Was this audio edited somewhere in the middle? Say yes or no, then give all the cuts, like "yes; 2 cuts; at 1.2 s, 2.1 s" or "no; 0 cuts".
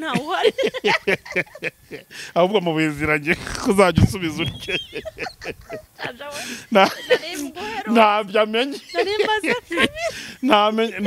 no; 0 cuts